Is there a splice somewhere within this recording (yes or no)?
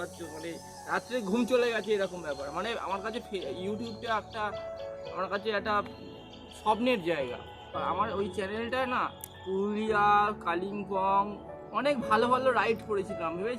yes